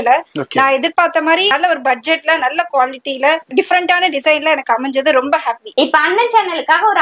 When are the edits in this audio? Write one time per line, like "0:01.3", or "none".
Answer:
0:01.5
0:03.5
0:05.6